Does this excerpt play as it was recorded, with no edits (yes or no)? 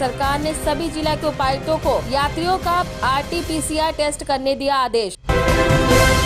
no